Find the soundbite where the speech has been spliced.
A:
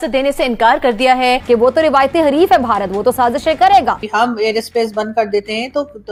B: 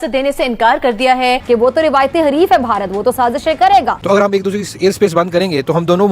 B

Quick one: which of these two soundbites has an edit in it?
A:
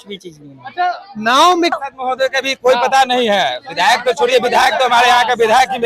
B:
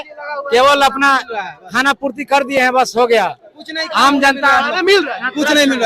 A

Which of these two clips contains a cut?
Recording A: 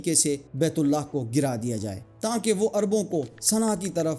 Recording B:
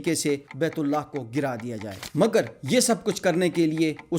B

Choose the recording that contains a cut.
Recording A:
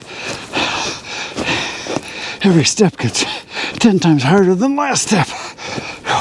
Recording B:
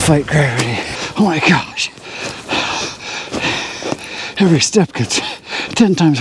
B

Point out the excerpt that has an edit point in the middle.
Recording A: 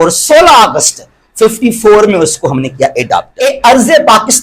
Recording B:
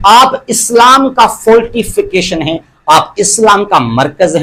A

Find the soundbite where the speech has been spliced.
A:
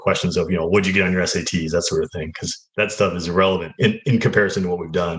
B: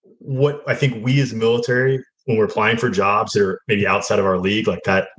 A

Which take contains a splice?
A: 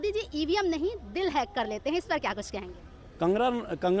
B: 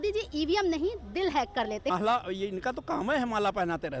B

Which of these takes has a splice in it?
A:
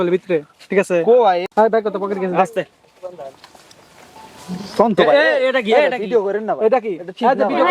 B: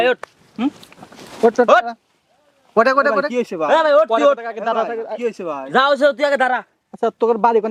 A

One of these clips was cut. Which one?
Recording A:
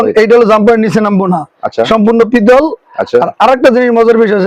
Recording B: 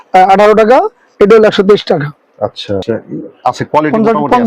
B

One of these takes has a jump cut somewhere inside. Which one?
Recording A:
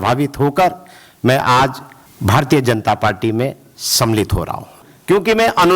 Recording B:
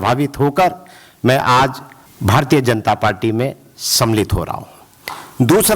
A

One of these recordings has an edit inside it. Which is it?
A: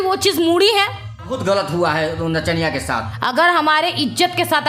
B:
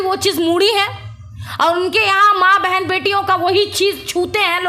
A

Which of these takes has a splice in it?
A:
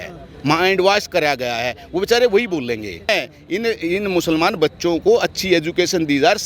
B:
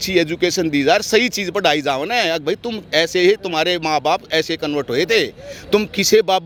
A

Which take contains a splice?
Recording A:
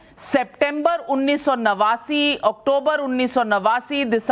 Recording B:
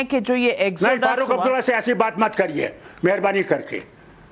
A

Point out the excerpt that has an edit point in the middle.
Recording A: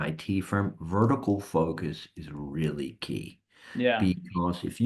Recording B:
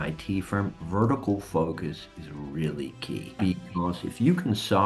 B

